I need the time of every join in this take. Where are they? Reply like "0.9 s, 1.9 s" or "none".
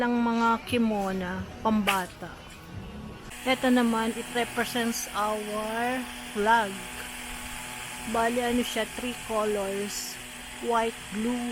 3.3 s